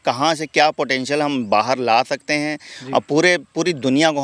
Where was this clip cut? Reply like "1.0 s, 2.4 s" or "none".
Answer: none